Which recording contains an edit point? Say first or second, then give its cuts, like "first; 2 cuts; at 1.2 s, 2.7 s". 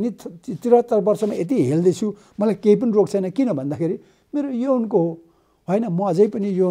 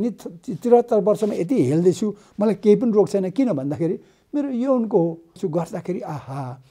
second; 1 cut; at 5.4 s